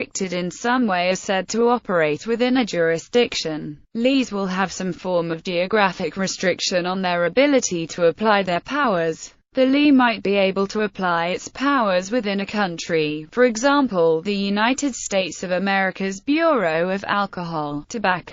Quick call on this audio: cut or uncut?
uncut